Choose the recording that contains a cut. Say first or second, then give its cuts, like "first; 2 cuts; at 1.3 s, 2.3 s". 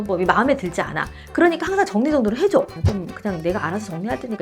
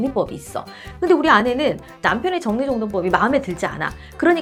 first; 1 cut; at 2.8 s